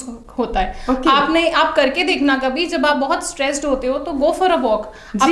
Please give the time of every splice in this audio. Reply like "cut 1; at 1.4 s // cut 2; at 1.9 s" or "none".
none

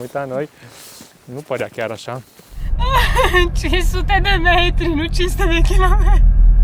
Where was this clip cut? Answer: cut 1; at 2.6 s

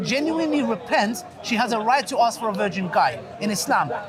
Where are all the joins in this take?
none

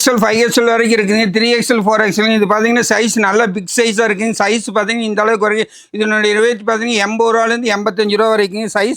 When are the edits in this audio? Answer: none

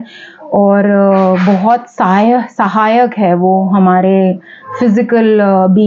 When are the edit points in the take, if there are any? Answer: none

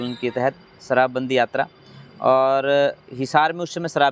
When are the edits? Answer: none

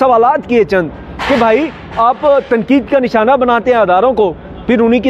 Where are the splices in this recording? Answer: none

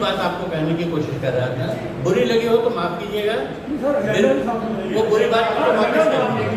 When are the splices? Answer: none

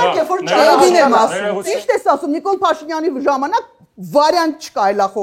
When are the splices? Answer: cut 1; at 1.5 s

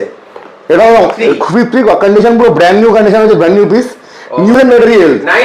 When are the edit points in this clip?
cut 1; at 4.5 s

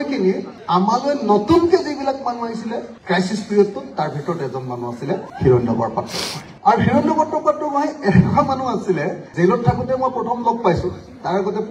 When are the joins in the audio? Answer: none

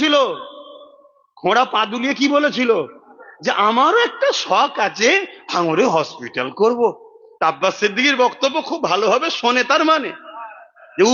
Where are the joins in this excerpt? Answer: none

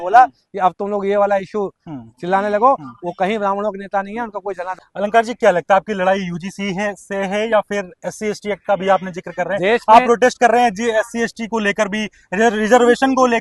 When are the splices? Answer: cut 1; at 4.7 s

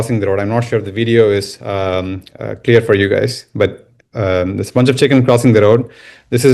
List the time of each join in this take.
none

